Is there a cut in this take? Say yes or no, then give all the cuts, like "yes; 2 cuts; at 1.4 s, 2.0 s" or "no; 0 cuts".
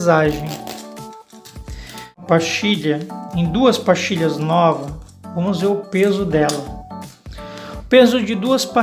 yes; 1 cut; at 2.2 s